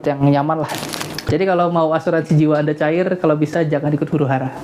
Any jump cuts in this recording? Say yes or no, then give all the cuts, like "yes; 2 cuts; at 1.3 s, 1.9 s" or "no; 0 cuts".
yes; 1 cut; at 1.2 s